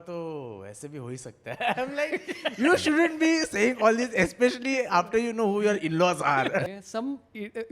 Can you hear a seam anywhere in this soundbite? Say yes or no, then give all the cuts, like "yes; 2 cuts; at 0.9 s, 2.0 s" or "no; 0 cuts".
yes; 1 cut; at 6.6 s